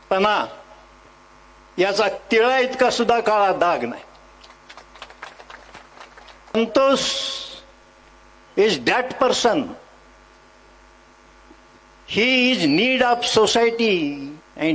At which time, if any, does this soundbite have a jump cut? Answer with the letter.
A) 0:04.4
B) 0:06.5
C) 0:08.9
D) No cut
B